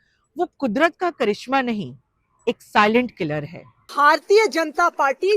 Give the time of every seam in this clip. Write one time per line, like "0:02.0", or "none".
0:03.9